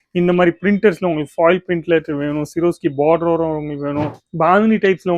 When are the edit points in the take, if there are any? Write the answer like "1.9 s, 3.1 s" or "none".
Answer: 4.2 s